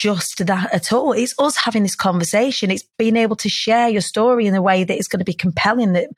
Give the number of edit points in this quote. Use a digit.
1